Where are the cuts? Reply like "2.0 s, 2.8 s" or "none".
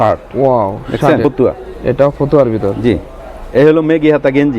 1.2 s